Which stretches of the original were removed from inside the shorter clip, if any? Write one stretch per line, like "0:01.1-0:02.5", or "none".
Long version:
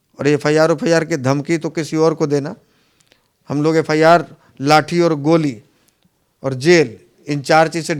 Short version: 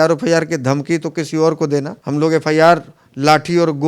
0:02.6-0:03.4